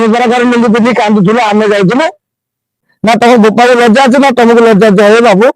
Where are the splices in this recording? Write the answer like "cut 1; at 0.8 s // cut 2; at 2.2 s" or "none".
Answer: cut 1; at 2.9 s